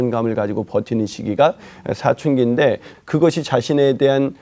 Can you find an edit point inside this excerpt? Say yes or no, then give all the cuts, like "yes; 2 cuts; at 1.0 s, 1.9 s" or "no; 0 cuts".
yes; 1 cut; at 2.9 s